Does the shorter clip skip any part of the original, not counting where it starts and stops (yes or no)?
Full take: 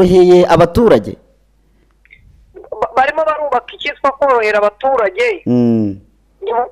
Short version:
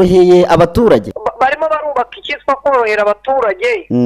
yes